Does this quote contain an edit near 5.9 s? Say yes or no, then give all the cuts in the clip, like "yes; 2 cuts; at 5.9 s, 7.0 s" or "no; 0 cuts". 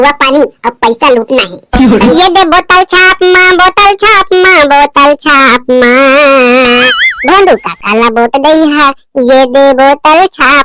no; 1 cut; at 2.1 s